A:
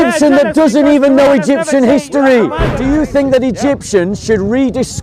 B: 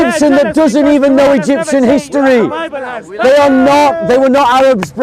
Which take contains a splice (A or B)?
A